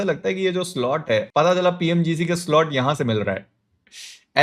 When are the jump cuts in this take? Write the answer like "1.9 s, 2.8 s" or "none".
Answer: none

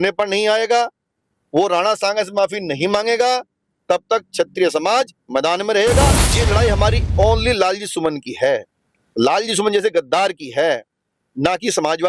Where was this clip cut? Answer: 6.3 s

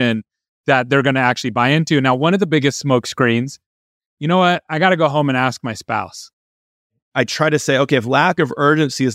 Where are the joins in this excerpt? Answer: 3.8 s, 7.0 s

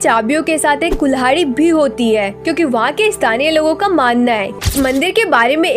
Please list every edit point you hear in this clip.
4.6 s

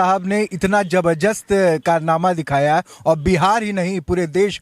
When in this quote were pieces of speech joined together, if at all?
none

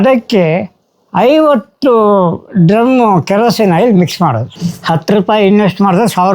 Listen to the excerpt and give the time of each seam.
4.5 s

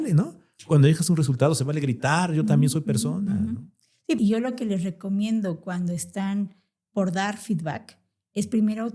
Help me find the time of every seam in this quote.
4.2 s

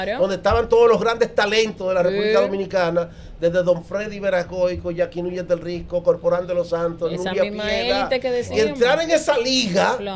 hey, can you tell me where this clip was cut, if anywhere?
none

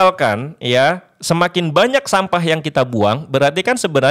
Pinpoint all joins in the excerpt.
none

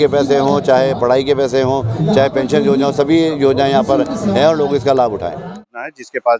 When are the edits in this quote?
5.5 s

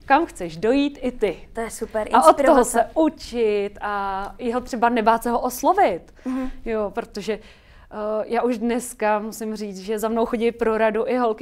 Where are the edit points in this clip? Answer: none

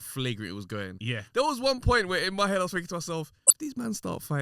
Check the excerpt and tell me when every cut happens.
3.4 s

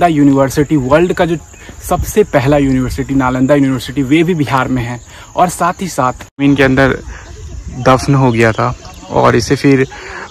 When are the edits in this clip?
6.3 s

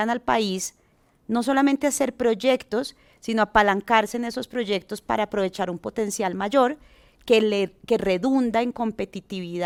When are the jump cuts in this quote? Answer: none

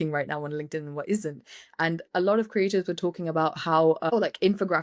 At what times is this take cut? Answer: none

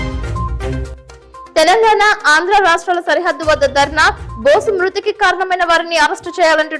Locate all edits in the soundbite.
none

